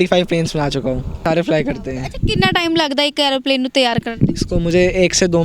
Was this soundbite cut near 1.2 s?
yes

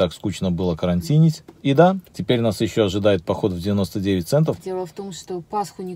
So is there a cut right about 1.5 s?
yes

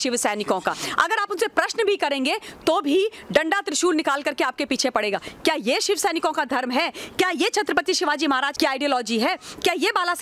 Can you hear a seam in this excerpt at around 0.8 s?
yes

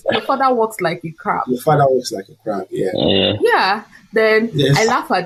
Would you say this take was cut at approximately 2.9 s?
no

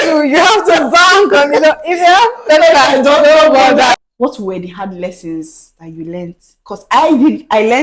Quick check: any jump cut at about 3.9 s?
yes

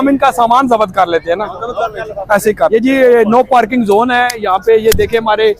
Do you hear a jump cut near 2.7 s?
yes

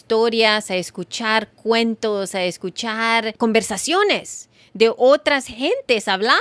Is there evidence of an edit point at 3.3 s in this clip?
yes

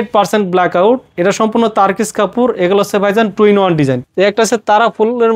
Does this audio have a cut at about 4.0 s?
yes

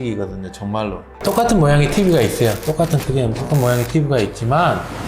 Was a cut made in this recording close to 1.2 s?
yes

